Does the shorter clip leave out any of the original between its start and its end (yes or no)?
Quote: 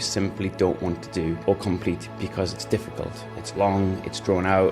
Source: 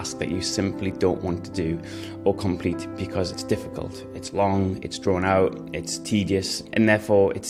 yes